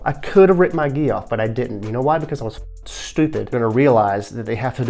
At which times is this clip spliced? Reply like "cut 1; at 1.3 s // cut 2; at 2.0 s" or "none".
cut 1; at 3.5 s